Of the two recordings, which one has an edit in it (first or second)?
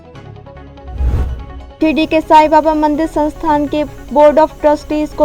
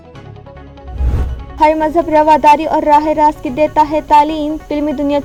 first